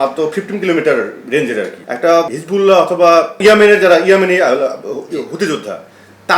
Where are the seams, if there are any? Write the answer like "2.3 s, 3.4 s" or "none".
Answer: 2.2 s, 3.3 s